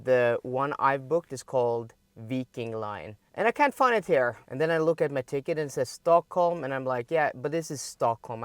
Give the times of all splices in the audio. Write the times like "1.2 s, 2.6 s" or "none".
3.2 s, 4.4 s